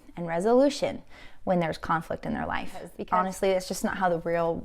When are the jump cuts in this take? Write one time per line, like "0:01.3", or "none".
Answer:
0:02.9